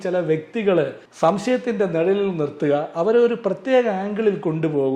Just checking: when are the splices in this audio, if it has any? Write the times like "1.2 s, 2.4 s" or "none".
none